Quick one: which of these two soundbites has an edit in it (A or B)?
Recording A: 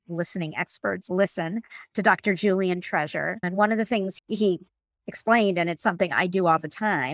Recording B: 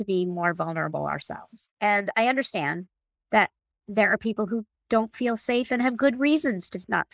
A